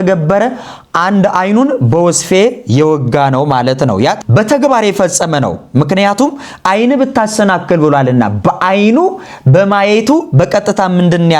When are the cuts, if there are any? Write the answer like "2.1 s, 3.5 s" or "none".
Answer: 4.2 s